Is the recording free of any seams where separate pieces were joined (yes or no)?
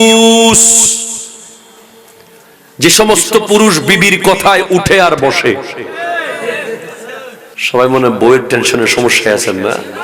no